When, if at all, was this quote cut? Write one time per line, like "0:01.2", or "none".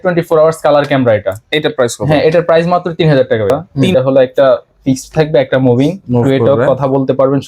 0:03.7